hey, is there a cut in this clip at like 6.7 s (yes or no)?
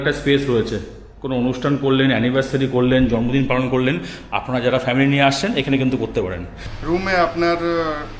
yes